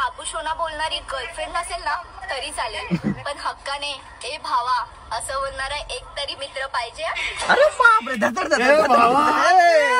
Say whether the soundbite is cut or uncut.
uncut